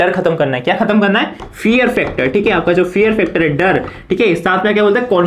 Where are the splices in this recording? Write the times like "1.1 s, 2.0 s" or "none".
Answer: none